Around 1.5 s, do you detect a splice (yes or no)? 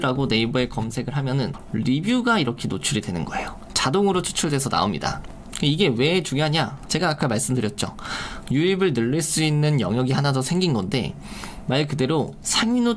yes